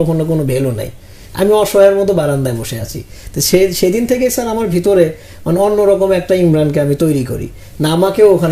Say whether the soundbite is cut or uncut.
uncut